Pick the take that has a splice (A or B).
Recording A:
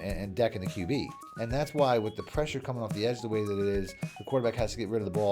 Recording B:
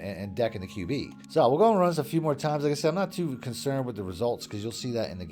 A